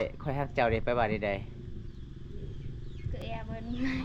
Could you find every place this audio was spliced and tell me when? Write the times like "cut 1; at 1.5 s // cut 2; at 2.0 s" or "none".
none